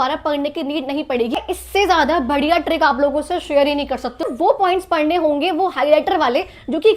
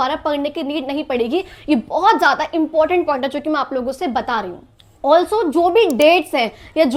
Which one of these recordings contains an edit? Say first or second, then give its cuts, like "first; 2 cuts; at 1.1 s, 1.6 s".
first; 2 cuts; at 1.3 s, 4.3 s